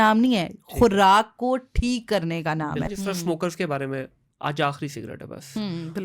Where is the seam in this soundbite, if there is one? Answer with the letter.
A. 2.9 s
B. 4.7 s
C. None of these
A